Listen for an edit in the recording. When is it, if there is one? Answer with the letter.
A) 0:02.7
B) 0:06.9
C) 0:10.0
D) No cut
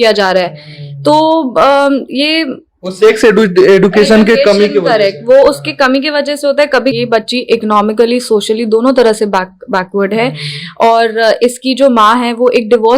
B